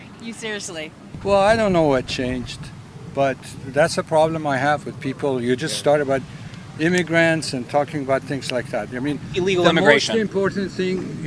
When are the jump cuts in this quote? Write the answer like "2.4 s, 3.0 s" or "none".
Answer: 1.0 s